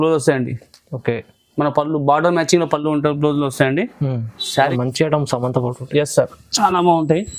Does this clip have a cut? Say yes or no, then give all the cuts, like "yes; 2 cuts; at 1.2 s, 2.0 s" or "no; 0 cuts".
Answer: yes; 1 cut; at 4.7 s